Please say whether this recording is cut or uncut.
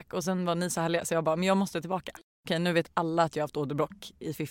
cut